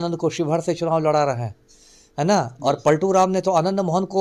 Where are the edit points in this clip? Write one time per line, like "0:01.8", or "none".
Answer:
none